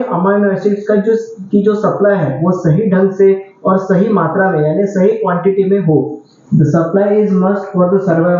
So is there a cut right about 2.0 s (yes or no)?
no